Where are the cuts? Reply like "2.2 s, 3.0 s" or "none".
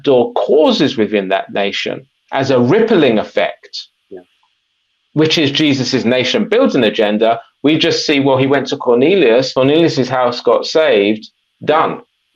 9.5 s